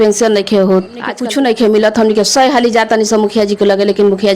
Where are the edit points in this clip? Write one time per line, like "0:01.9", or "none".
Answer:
0:01.2

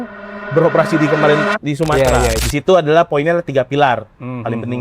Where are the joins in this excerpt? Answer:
0:02.4

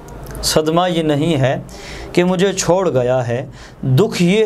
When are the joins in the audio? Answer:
none

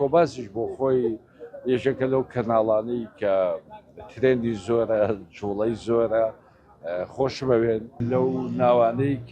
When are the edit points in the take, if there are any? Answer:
0:08.0

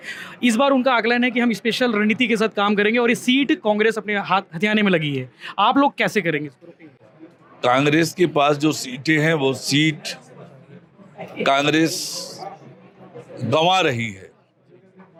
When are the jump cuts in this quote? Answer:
none

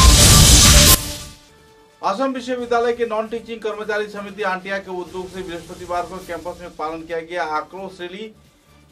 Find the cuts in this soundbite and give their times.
0:01.1

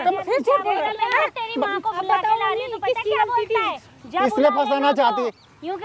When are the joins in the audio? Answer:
none

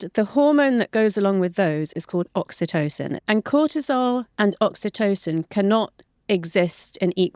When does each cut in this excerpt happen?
0:03.2

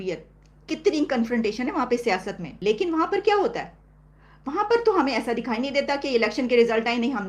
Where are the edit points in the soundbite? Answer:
0:02.5

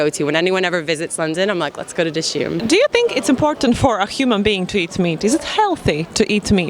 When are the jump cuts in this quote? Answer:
0:02.6

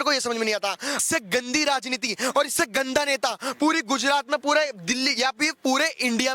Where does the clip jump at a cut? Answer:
0:01.0

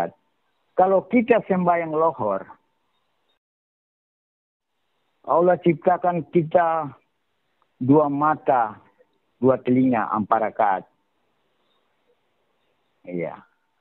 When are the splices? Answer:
none

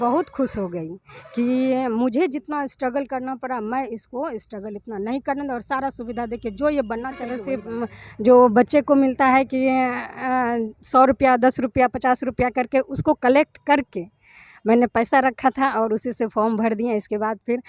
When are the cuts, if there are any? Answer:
0:07.7

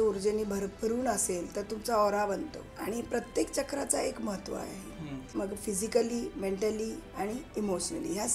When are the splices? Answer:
0:02.7
0:05.3
0:07.0

